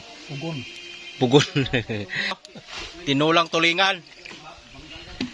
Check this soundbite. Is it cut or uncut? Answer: cut